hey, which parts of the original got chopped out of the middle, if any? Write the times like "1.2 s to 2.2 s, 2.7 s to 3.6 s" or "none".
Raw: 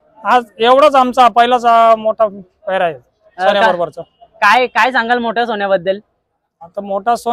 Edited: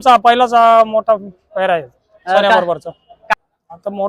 4.3 s to 6.1 s